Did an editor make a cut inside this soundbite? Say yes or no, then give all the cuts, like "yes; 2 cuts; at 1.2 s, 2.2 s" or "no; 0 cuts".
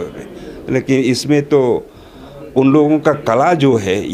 no; 0 cuts